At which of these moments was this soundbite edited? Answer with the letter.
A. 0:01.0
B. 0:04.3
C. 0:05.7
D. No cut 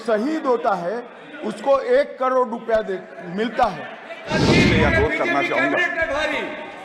B